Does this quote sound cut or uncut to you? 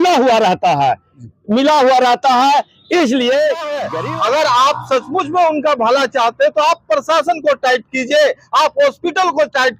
cut